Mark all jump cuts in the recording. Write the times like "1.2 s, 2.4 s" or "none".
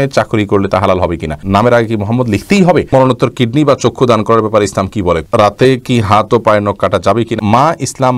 1.4 s, 2.9 s, 5.2 s, 7.4 s